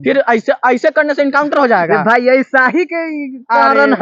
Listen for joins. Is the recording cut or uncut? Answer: uncut